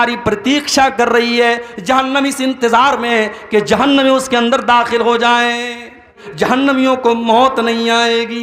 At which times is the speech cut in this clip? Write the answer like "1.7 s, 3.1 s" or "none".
6.3 s